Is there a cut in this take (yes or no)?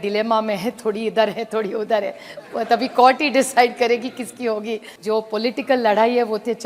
yes